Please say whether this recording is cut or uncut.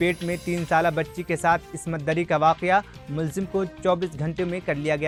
uncut